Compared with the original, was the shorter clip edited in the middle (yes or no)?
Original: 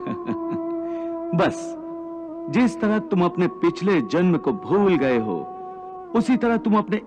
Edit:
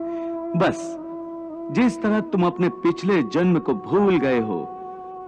no